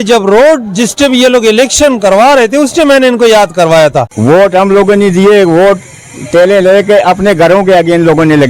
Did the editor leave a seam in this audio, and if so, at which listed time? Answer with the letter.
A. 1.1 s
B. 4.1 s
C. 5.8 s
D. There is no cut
B